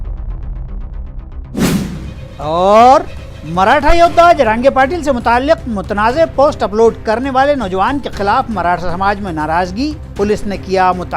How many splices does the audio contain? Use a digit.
0